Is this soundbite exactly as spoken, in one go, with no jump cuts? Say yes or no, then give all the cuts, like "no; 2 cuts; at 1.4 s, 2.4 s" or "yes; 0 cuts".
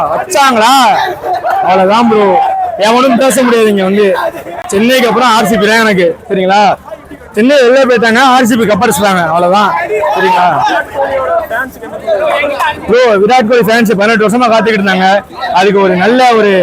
yes; 0 cuts